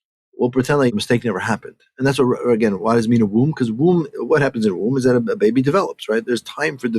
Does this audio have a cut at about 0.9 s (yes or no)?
yes